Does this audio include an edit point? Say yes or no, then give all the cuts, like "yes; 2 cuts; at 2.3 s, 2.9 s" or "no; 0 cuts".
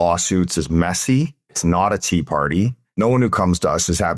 yes; 2 cuts; at 1.5 s, 2.9 s